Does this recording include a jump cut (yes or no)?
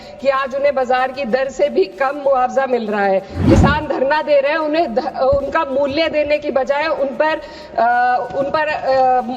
yes